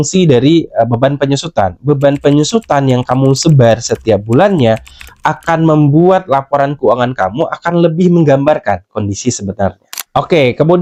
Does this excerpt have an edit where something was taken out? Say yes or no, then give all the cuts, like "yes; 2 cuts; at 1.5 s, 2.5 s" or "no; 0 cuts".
no; 0 cuts